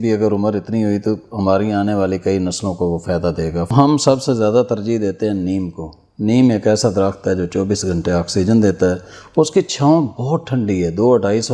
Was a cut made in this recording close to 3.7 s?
yes; 1 cut; at 3.7 s

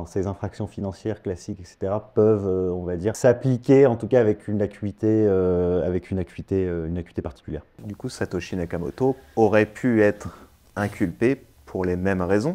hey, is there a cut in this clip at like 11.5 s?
no; 2 cuts; at 3.2 s, 7.8 s

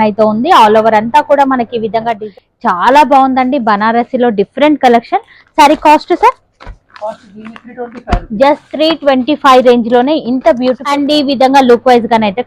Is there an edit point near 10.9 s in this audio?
yes; 2 cuts; at 2.2 s, 10.9 s

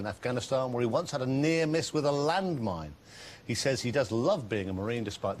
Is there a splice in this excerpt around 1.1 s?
yes; 1 cut; at 1.1 s

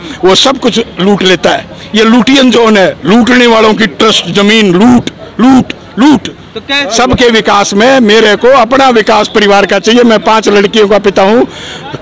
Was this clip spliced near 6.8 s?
yes; 1 cut; at 6.8 s

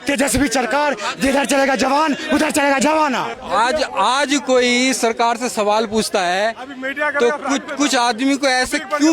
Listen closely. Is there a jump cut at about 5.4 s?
no; 1 cut; at 3.4 s

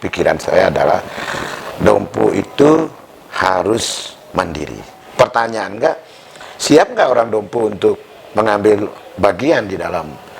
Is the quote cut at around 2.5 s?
no; 1 cut; at 5.0 s

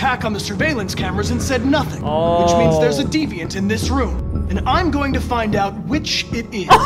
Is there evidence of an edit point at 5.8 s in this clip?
no; 2 cuts; at 2.0 s, 4.2 s

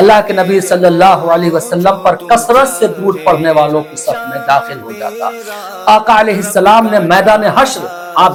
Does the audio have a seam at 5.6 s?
no; 0 cuts

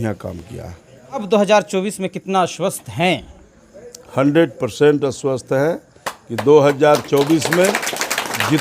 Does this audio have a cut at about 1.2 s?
yes; 1 cut; at 1.2 s

